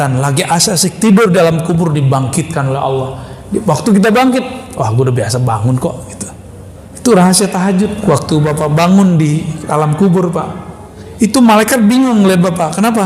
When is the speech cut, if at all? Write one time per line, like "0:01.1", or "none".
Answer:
0:08.0